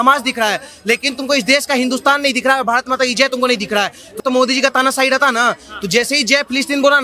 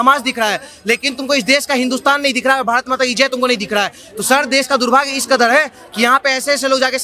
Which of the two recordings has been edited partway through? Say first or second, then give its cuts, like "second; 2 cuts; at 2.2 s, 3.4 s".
first; 1 cut; at 4.2 s